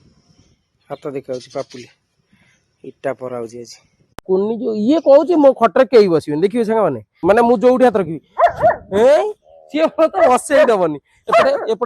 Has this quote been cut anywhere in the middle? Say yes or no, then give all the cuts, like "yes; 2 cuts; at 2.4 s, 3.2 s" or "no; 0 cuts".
yes; 2 cuts; at 4.2 s, 7.1 s